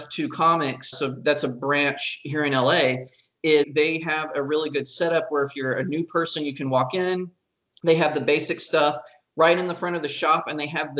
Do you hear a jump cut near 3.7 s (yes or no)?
yes